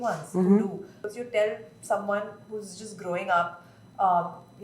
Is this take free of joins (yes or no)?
no